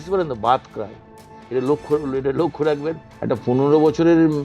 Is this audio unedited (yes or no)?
no